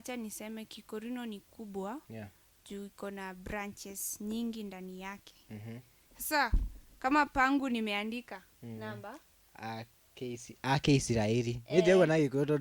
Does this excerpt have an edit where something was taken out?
no; 0 cuts

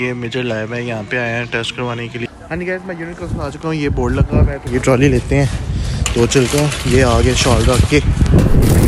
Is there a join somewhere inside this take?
yes; 2 cuts; at 2.3 s, 4.6 s

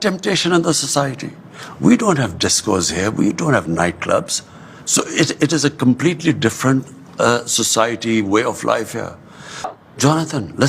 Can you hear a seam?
yes; 1 cut; at 9.7 s

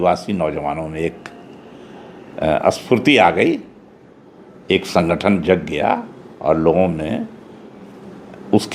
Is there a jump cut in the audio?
no; 0 cuts

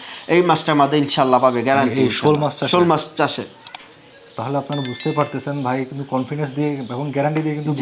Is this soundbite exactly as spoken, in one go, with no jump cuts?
yes; 0 cuts

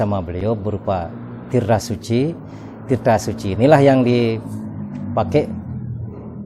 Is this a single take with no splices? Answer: yes; 0 cuts

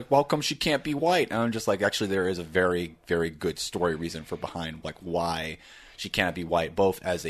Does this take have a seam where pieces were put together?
no; 0 cuts

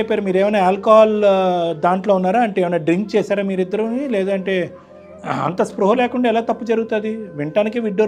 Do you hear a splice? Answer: no; 0 cuts

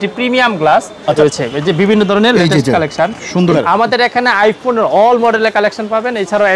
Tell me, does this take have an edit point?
yes; 2 cuts; at 1.2 s, 3.6 s

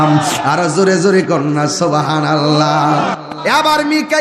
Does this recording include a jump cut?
yes; 1 cut; at 3.3 s

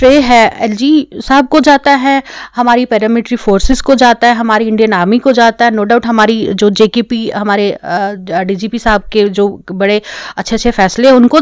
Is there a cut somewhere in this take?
no; 0 cuts

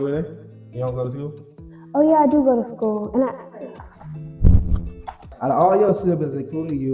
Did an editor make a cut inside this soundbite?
yes; 1 cut; at 5.3 s

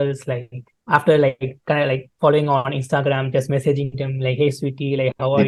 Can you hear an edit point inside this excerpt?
no; 0 cuts

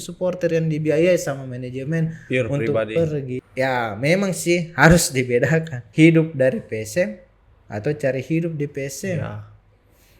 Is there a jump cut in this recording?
yes; 2 cuts; at 3.3 s, 5.8 s

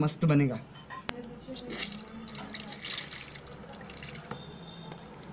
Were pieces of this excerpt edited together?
no; 0 cuts

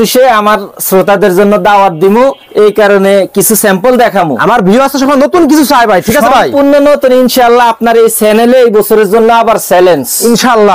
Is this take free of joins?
yes; 0 cuts

